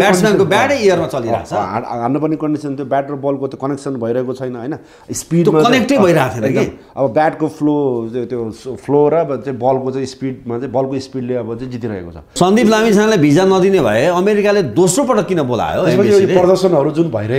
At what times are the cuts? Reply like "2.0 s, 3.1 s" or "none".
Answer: 12.3 s